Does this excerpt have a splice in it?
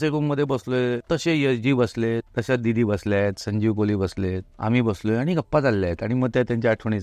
yes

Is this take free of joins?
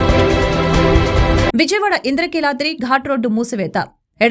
no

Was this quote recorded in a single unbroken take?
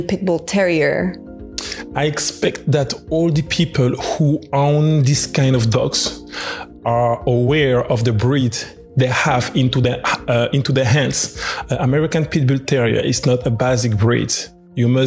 yes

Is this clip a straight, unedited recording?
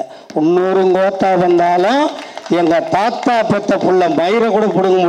yes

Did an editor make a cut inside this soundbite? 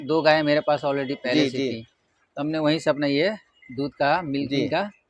no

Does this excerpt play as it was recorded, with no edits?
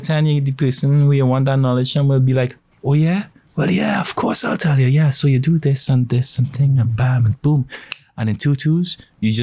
yes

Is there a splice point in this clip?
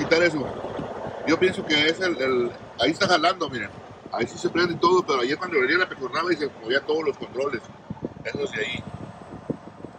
no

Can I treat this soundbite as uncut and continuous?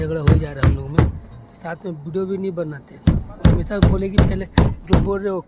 no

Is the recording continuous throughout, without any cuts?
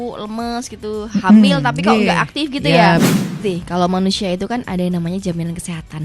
no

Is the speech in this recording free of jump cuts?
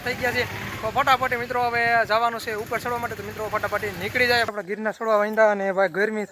no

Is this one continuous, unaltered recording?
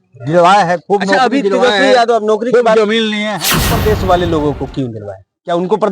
no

